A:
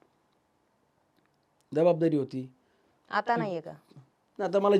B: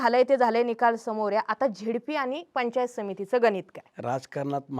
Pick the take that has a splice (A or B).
B